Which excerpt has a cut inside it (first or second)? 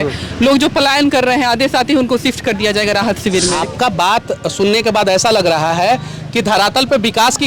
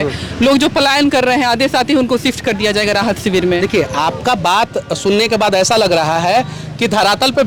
first